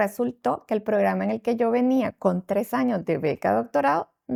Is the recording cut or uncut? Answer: uncut